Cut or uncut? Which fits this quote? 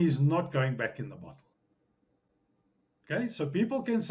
uncut